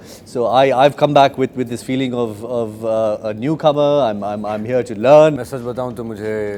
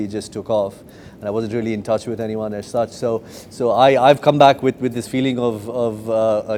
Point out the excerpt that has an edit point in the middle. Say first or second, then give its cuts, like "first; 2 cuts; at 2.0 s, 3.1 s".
first; 1 cut; at 5.3 s